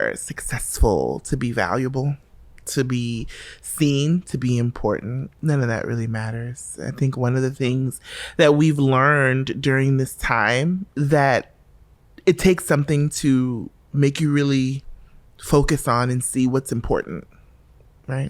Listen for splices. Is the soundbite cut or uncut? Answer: cut